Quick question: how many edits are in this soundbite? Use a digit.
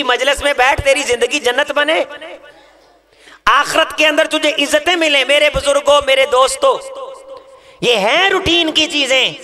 0